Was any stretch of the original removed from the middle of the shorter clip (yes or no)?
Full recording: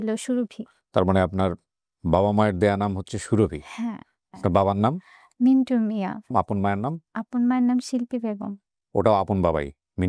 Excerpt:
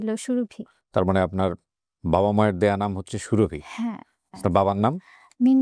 no